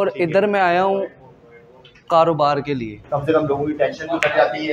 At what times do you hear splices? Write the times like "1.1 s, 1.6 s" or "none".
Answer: 2.9 s